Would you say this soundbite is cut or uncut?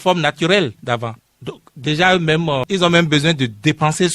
cut